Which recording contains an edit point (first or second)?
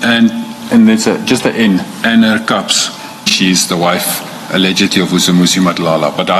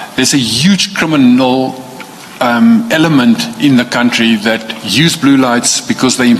first